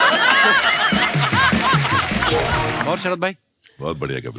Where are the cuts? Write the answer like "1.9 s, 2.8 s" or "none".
2.8 s